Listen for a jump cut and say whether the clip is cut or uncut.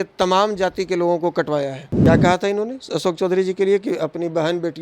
cut